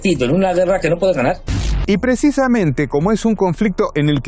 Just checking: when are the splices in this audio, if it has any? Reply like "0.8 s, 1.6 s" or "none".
none